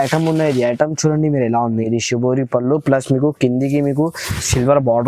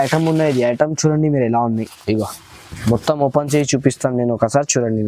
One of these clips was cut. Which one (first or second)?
first